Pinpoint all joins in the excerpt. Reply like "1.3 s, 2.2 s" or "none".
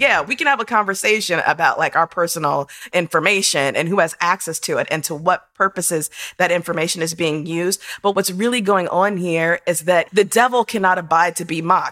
2.9 s, 8.1 s, 10.1 s